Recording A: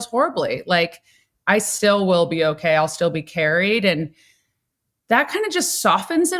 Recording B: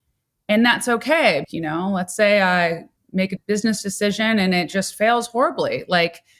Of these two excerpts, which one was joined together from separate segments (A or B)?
B